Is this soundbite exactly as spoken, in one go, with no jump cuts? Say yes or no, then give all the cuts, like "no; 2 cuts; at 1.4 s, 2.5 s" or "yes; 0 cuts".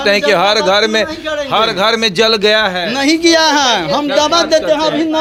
yes; 0 cuts